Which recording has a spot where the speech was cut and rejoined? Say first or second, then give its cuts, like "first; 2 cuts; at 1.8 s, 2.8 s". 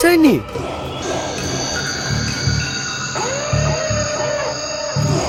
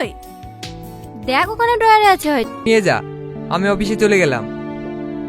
second; 1 cut; at 2.6 s